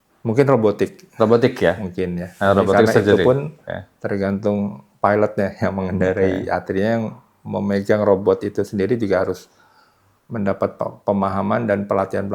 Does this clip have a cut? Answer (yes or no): no